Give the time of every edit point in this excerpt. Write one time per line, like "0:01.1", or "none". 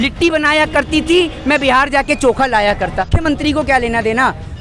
0:03.1